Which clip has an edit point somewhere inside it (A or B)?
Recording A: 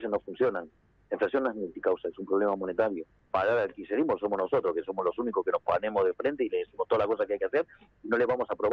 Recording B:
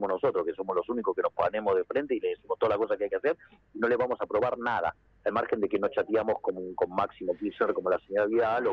A